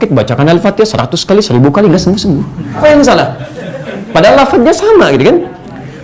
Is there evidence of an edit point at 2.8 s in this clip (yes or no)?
yes